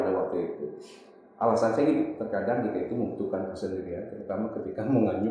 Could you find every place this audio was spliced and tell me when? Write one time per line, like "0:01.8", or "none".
none